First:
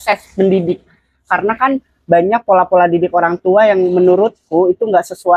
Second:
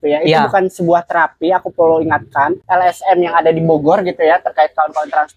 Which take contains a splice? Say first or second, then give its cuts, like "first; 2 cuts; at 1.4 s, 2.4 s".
second; 1 cut; at 2.6 s